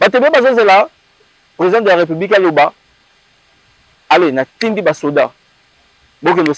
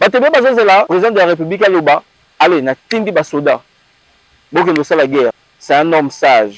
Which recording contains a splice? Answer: second; 3 cuts; at 0.9 s, 2.2 s, 5.5 s

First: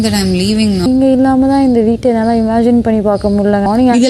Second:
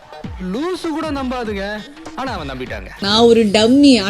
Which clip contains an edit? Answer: second; 1 cut; at 2.9 s

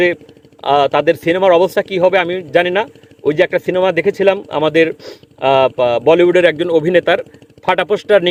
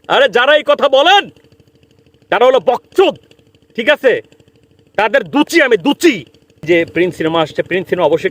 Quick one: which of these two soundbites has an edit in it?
second; 1 cut; at 6.6 s

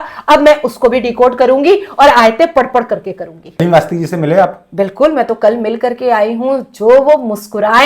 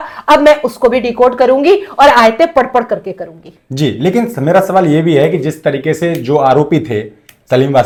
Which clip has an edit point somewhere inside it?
first; 1 cut; at 3.6 s

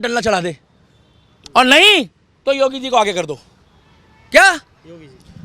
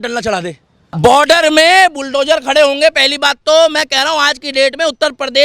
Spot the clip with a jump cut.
second; 1 cut; at 0.9 s

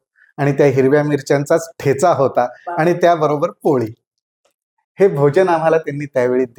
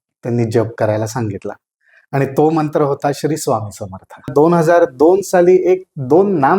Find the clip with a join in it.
second; 1 cut; at 4.3 s

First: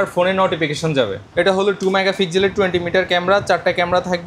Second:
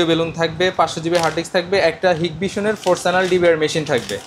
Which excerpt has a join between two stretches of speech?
first; 1 cut; at 1.3 s

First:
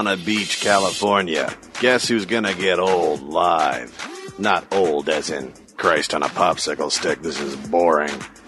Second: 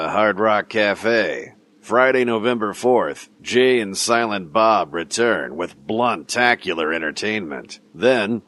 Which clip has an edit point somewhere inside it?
first; 1 cut; at 1.7 s

